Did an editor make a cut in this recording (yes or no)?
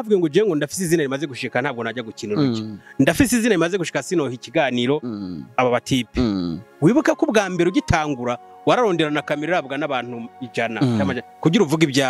no